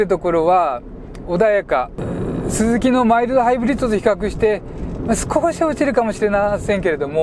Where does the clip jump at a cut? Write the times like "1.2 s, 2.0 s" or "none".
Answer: 2.0 s